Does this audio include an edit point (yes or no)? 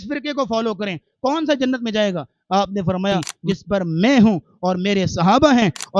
yes